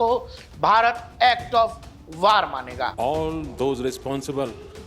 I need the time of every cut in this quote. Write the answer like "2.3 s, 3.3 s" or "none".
2.9 s